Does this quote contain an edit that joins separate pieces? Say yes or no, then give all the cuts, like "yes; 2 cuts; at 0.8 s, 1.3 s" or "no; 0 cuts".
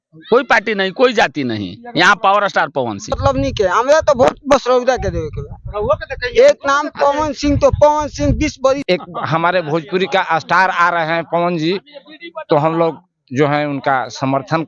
yes; 2 cuts; at 3.1 s, 8.8 s